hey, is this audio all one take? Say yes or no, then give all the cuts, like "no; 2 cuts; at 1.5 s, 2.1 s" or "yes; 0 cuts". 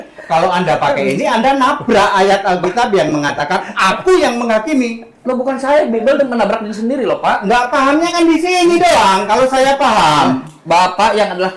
yes; 0 cuts